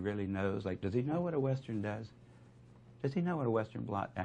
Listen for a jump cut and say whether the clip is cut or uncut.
cut